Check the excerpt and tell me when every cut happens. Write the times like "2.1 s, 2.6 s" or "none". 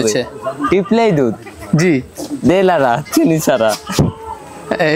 none